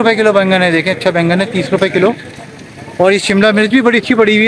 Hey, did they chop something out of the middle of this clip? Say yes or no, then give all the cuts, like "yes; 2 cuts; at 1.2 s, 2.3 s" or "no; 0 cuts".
no; 0 cuts